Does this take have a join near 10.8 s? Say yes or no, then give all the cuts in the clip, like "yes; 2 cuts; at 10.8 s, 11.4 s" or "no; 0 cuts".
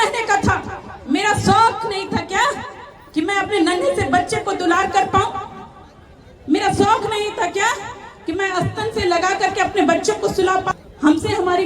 yes; 1 cut; at 10.8 s